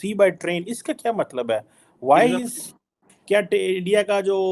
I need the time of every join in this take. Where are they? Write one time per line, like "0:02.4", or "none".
none